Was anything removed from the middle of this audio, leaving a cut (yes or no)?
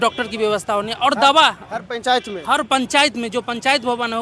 no